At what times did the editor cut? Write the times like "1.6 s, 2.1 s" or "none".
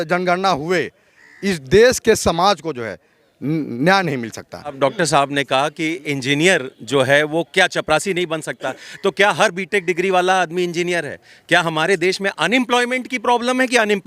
4.7 s